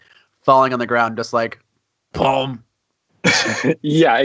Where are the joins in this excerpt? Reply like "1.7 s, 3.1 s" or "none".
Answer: none